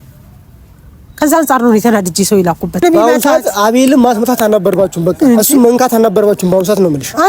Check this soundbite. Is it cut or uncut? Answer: cut